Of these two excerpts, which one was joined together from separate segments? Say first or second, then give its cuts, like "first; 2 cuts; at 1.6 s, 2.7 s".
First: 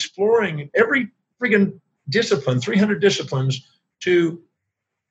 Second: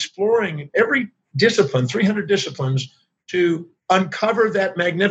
second; 2 cuts; at 1.2 s, 3.7 s